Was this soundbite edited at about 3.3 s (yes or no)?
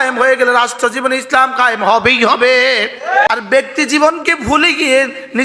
yes